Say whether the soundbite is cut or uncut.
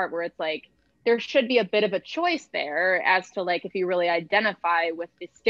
uncut